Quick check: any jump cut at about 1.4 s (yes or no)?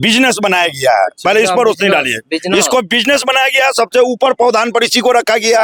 no